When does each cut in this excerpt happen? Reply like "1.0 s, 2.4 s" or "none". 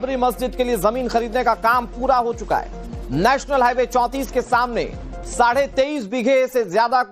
none